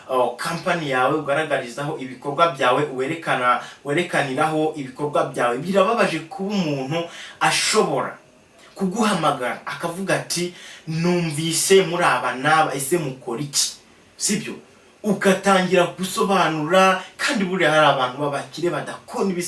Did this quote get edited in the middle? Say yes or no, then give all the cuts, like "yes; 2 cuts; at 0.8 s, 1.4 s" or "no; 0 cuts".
no; 0 cuts